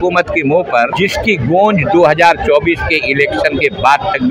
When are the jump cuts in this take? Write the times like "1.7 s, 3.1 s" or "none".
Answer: 0.9 s

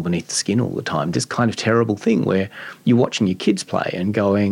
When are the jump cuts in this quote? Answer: none

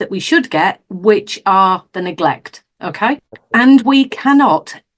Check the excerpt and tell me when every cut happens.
3.3 s

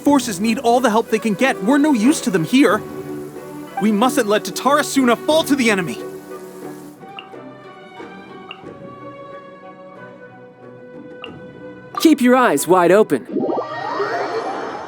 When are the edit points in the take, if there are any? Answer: 6.9 s, 13.3 s

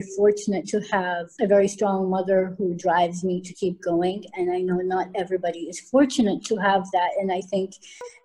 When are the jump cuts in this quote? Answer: 1.2 s

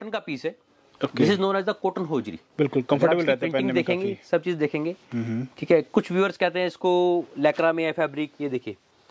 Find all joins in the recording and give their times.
none

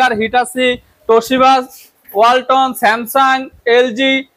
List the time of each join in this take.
none

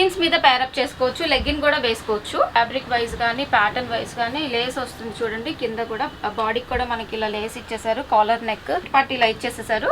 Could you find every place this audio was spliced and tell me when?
2.6 s, 8.9 s

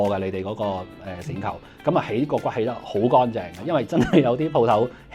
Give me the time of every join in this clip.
none

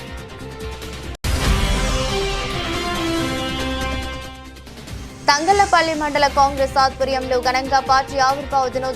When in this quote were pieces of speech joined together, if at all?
1.2 s, 3.8 s, 5.1 s

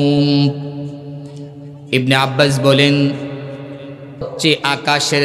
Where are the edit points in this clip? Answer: 1.7 s, 4.3 s

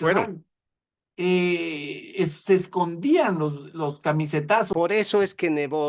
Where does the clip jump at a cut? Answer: 4.7 s

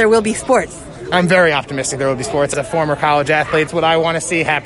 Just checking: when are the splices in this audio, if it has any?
2.5 s, 3.7 s

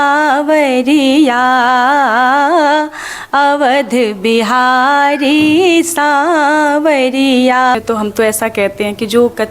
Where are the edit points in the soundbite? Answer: 7.7 s

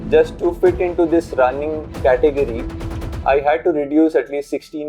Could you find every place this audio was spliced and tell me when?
none

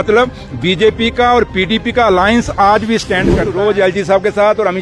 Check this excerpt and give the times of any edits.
3.5 s

